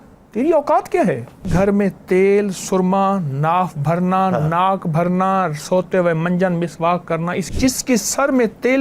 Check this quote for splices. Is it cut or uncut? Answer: cut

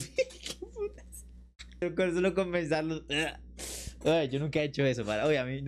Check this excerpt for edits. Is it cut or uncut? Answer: uncut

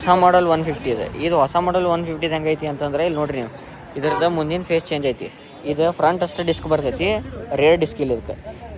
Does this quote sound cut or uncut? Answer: uncut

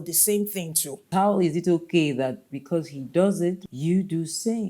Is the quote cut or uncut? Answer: cut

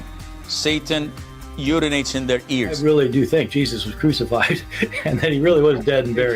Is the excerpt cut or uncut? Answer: cut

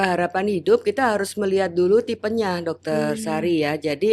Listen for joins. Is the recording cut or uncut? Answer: uncut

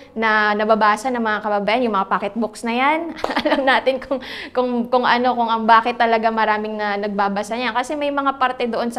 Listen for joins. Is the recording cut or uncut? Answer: uncut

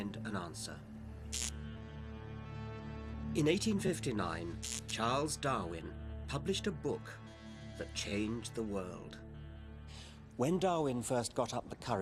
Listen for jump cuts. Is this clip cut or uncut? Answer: uncut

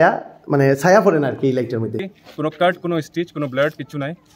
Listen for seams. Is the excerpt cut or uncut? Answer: cut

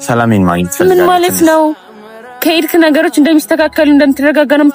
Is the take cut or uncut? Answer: uncut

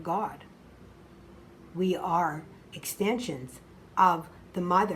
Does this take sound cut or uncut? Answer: uncut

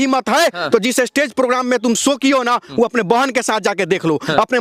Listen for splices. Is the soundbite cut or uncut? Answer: uncut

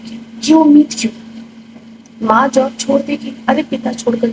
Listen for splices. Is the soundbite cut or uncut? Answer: uncut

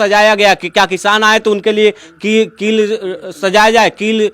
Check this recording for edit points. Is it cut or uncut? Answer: uncut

